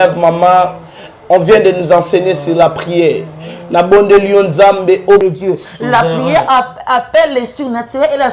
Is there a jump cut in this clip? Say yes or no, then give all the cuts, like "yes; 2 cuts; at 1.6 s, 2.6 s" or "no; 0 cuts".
yes; 1 cut; at 5.2 s